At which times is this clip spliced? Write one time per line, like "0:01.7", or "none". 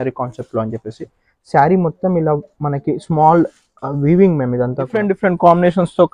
0:05.1